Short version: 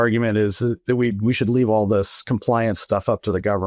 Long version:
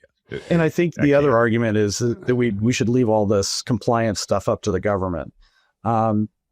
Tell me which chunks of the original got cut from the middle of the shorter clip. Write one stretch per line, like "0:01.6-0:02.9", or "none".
none